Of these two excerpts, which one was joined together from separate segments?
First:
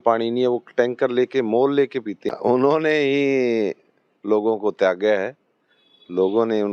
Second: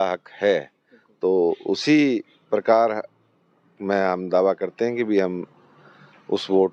first; 1 cut; at 2.3 s

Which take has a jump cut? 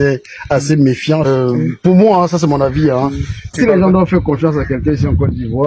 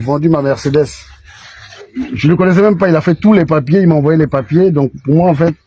first; 2 cuts; at 1.3 s, 3.6 s

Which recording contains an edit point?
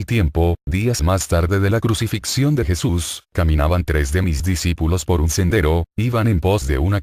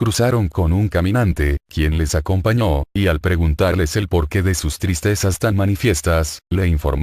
first; 1 cut; at 1.5 s

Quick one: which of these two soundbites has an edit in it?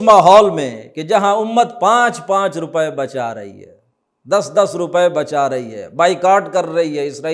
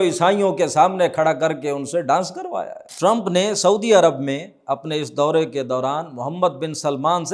second; 1 cut; at 2.9 s

